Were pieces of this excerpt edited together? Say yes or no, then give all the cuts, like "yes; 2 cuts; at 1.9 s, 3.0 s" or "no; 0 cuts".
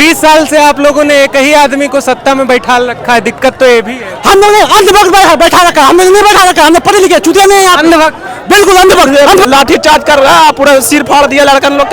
yes; 1 cut; at 9.2 s